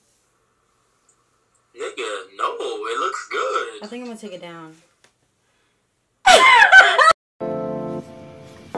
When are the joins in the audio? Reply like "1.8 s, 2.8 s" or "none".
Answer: 7.3 s